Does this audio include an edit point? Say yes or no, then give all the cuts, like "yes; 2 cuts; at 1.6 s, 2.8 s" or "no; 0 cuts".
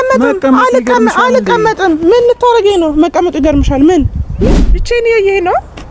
yes; 1 cut; at 4.4 s